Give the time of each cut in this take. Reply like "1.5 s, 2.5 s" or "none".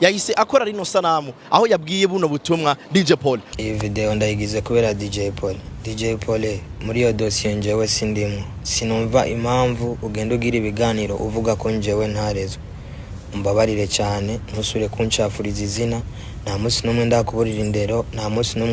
3.5 s